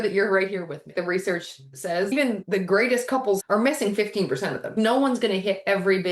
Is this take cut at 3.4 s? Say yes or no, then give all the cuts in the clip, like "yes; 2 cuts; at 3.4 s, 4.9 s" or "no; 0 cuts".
yes; 4 cuts; at 0.9 s, 2.4 s, 3.4 s, 4.7 s